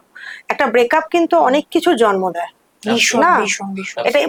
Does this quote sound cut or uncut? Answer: uncut